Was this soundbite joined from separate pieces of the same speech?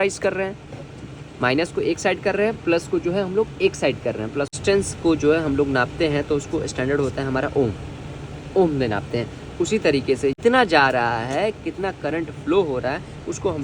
yes; 2 cuts; at 4.5 s, 10.4 s

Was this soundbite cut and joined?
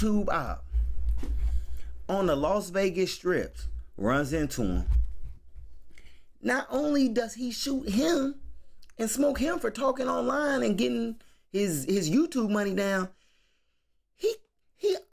no; 0 cuts

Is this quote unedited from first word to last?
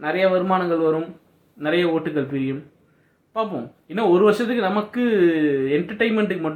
yes; 0 cuts

